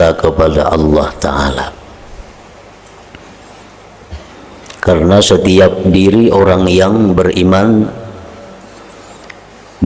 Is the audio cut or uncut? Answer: uncut